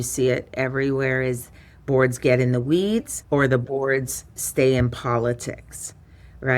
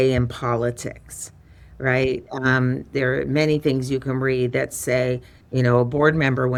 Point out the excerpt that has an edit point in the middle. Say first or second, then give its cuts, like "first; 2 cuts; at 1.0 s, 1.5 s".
first; 1 cut; at 3.1 s